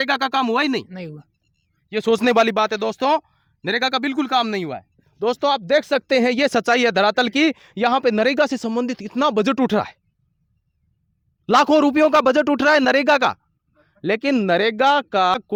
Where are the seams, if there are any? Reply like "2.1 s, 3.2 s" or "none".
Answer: none